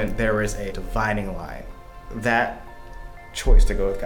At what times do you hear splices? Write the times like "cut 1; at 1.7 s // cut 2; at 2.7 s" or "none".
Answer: cut 1; at 1.8 s